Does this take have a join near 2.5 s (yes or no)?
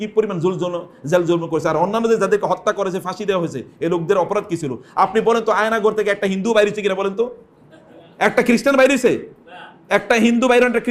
no